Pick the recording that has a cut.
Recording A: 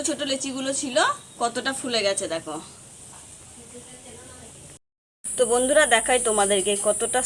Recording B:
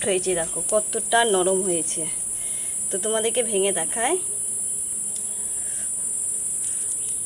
A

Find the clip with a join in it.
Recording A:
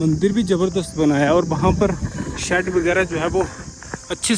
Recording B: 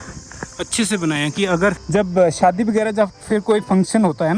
B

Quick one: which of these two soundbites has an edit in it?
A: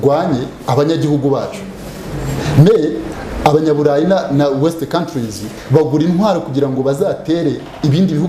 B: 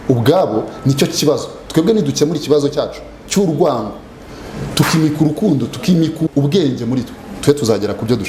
B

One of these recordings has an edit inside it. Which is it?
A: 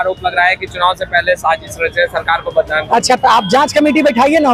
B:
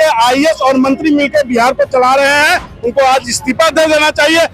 B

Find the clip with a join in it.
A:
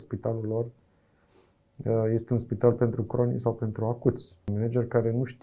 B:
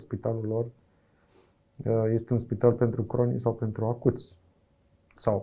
A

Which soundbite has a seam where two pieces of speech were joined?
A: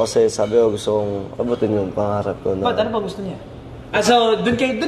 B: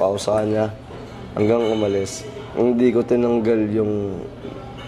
A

